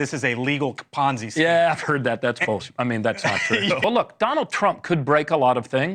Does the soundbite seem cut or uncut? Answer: cut